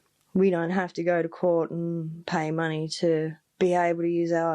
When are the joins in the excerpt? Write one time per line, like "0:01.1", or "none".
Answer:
0:03.4